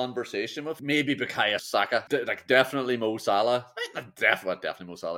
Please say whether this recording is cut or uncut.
cut